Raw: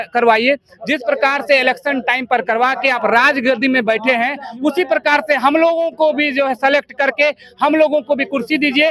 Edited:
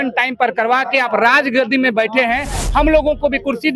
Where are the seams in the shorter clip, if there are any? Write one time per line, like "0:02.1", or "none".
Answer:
0:02.6